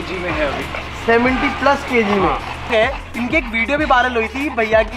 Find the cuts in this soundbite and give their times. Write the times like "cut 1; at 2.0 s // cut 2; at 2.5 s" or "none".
cut 1; at 2.7 s